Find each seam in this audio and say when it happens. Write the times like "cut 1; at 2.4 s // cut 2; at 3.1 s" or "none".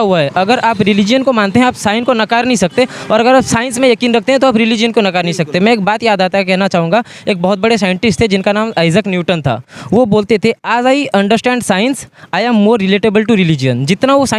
none